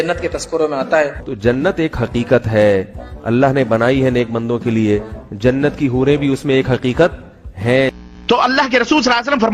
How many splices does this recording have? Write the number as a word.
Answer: zero